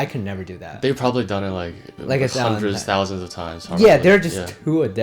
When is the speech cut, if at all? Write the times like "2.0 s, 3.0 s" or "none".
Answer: none